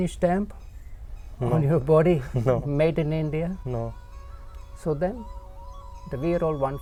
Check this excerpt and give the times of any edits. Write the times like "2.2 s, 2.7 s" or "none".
none